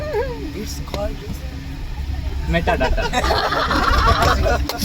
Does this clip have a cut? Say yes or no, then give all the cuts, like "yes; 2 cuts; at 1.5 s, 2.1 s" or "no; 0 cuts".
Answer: yes; 1 cut; at 3.8 s